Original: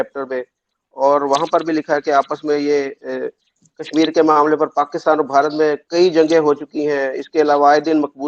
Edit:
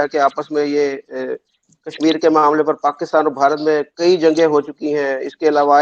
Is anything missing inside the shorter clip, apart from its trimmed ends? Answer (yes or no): no